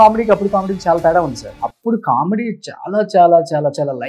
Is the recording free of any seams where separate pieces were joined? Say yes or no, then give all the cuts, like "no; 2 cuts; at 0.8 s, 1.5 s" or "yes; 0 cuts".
no; 1 cut; at 1.5 s